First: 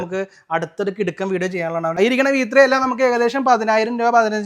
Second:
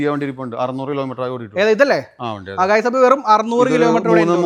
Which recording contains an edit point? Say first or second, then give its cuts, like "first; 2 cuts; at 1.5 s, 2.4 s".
first; 1 cut; at 2.0 s